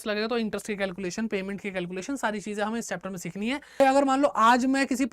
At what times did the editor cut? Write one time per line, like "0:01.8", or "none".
0:03.8